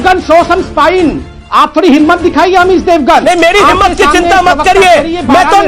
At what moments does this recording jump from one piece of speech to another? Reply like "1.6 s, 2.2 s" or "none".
1.3 s